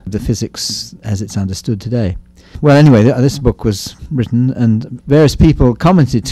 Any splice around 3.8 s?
no; 1 cut; at 1.2 s

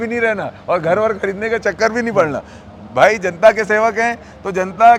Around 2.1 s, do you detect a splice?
no; 0 cuts

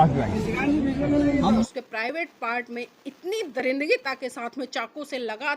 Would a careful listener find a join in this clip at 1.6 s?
yes; 1 cut; at 1.6 s

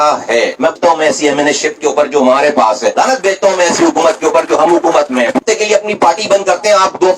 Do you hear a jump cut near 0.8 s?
yes; 2 cuts; at 0.8 s, 5.4 s

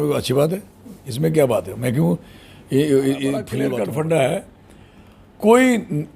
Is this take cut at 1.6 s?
no; 1 cut; at 3.5 s

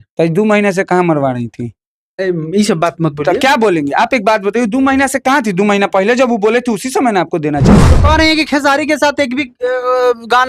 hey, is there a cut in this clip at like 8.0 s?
yes; 1 cut; at 8.0 s

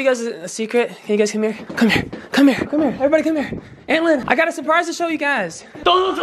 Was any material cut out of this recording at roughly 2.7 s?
yes; 3 cuts; at 1.6 s, 2.7 s, 4.2 s

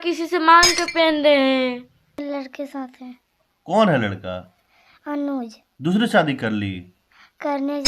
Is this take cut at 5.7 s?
no; 1 cut; at 2.2 s

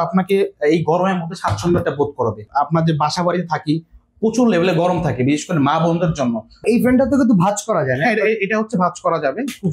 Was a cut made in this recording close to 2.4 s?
yes; 2 cuts; at 2.4 s, 6.6 s

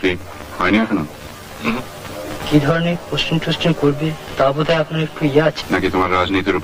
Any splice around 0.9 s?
no; 2 cuts; at 2.4 s, 5.6 s

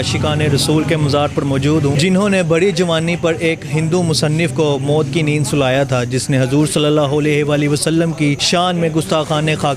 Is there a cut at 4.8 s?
no; 2 cuts; at 2.0 s, 8.4 s

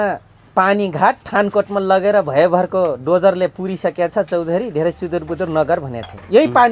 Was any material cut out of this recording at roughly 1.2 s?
no; 0 cuts

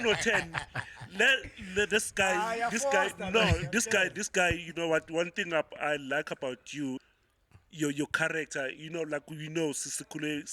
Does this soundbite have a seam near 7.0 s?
yes; 1 cut; at 7.0 s

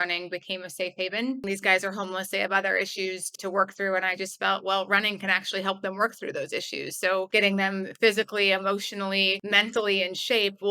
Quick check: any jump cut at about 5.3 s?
no; 4 cuts; at 1.4 s, 3.3 s, 7.3 s, 9.4 s

